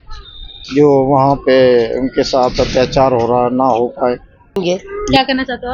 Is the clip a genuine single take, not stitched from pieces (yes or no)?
no